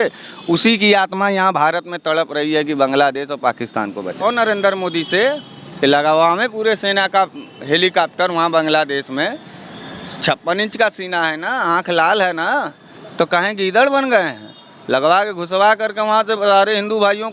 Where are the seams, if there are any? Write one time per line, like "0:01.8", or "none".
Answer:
0:04.2